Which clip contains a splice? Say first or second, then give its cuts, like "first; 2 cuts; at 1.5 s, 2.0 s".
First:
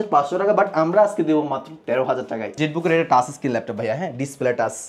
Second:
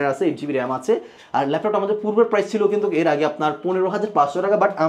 first; 1 cut; at 2.5 s